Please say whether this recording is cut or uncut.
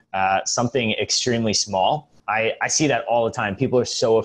cut